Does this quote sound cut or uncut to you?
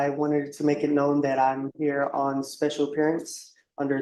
uncut